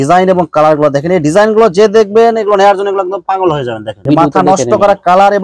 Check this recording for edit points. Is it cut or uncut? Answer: cut